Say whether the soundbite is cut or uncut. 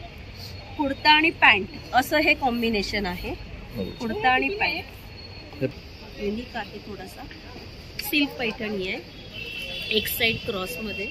cut